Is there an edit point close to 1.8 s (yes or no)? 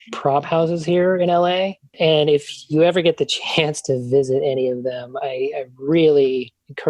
yes